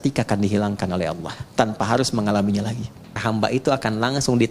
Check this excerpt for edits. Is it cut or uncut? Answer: cut